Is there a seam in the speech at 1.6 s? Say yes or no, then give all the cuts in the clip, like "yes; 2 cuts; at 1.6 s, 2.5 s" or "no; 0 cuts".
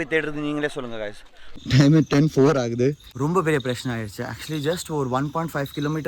yes; 2 cuts; at 1.6 s, 3.1 s